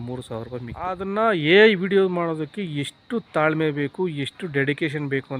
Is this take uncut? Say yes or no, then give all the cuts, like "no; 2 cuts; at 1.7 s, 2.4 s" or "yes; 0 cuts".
no; 1 cut; at 1.0 s